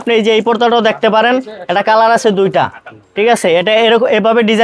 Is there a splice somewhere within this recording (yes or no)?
no